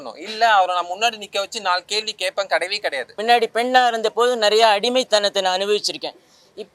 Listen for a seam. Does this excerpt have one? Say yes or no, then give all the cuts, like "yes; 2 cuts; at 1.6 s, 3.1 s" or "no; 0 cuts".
yes; 1 cut; at 3.2 s